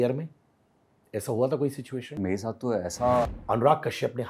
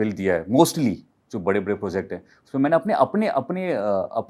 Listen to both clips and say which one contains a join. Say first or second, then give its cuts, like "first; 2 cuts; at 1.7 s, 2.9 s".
first; 2 cuts; at 2.2 s, 3.4 s